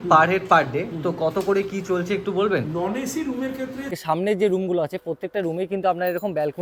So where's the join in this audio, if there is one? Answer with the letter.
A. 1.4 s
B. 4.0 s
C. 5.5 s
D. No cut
B